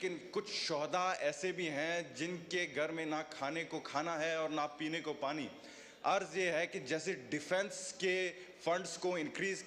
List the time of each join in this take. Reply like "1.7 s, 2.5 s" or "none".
none